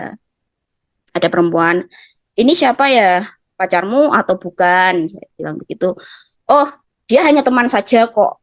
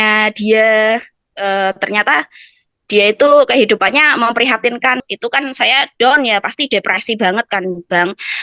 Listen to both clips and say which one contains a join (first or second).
second